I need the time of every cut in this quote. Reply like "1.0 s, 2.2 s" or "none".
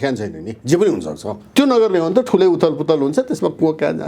1.5 s